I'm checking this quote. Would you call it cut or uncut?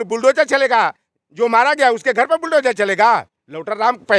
uncut